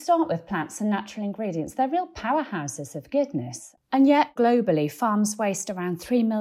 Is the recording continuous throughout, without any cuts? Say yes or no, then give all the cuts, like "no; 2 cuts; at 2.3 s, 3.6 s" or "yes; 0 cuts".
no; 2 cuts; at 3.6 s, 4.3 s